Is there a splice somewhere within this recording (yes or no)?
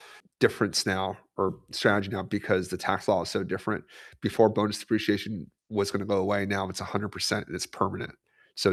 no